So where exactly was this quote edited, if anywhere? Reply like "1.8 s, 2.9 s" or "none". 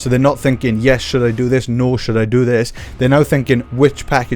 none